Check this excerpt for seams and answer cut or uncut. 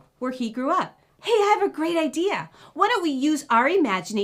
cut